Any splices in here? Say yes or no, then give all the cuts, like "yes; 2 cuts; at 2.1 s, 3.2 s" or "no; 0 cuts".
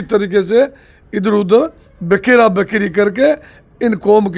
no; 0 cuts